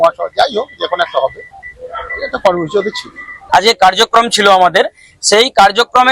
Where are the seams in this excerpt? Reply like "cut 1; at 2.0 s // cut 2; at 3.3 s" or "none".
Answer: cut 1; at 3.4 s